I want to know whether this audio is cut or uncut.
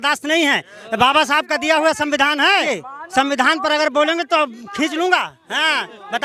uncut